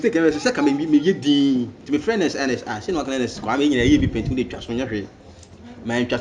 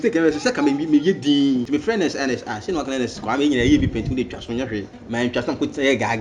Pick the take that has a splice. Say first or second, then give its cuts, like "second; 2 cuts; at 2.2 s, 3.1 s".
second; 2 cuts; at 1.7 s, 5.0 s